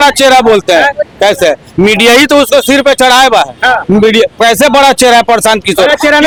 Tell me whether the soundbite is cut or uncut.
uncut